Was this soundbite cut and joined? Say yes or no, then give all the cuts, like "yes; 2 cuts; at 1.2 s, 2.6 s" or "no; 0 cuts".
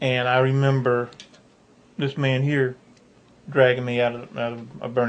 no; 0 cuts